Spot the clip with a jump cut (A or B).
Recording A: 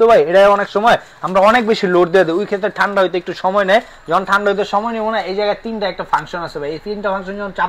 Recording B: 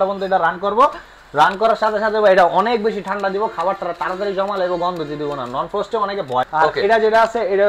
B